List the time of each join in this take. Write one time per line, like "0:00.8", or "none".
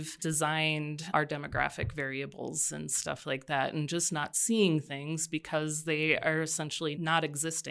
0:01.0
0:07.0